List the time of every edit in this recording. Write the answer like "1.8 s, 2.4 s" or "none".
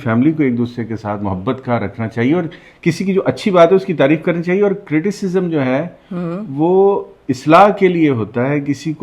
none